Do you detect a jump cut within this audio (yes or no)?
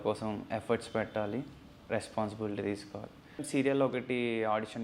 yes